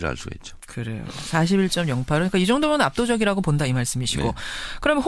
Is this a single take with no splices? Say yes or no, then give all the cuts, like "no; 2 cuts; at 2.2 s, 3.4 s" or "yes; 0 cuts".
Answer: no; 1 cut; at 4.0 s